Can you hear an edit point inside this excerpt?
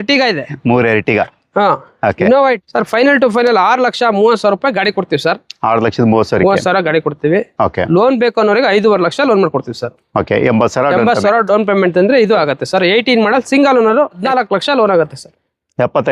yes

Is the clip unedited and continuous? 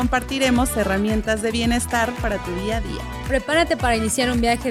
yes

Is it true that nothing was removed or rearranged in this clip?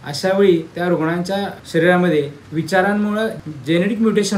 no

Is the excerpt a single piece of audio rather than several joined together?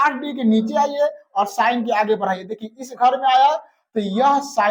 yes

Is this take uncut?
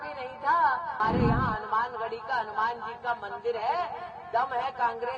no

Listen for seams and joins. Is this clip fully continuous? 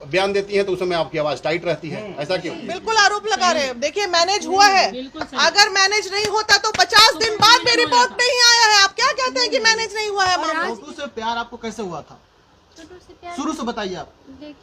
no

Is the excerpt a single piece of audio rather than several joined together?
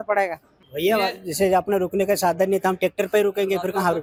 yes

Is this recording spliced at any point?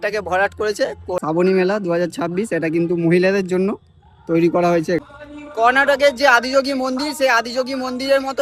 yes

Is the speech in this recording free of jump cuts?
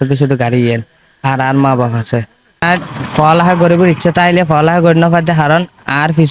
no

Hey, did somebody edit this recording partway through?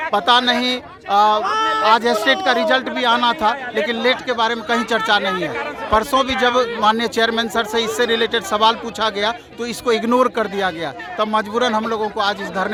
no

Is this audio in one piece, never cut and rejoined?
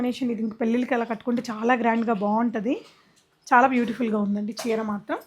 yes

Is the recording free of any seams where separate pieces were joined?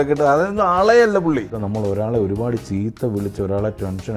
no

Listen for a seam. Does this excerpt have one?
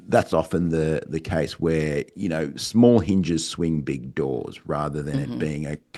no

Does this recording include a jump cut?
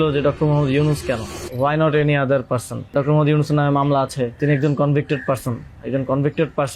yes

